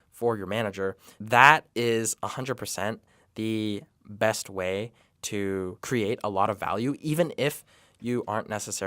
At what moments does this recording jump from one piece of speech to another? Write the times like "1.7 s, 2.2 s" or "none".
1.1 s, 5.8 s